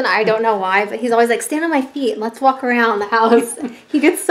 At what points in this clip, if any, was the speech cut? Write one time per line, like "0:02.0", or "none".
none